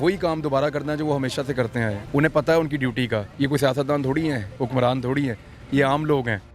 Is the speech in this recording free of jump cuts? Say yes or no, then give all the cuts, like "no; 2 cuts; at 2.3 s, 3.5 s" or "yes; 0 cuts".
no; 2 cuts; at 2.0 s, 3.3 s